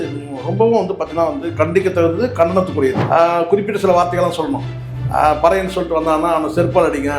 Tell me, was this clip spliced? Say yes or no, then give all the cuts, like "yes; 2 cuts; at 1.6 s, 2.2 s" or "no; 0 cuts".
yes; 1 cut; at 3.0 s